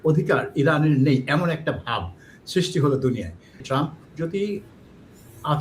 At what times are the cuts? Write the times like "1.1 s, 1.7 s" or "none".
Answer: 3.6 s